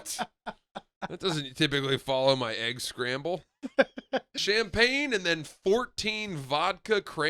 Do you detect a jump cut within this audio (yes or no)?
yes